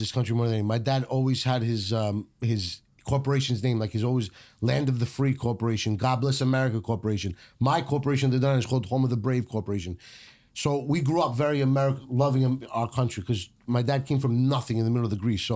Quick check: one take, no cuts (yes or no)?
yes